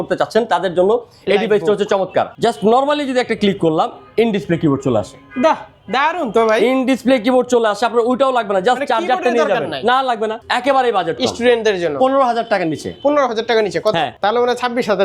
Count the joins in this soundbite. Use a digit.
3